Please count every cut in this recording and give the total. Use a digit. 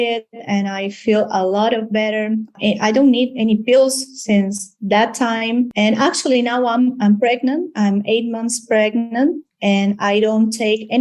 2